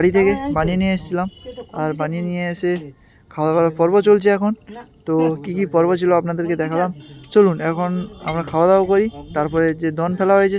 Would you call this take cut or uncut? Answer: uncut